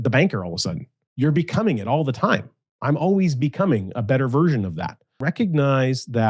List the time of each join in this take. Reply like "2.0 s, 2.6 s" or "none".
1.0 s, 5.2 s